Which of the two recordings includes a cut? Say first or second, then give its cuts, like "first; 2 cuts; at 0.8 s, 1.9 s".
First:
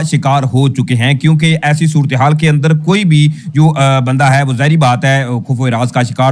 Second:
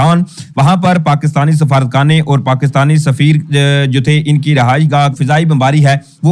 second; 1 cut; at 5.2 s